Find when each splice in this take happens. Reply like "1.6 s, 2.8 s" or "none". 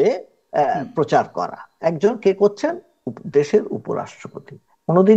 none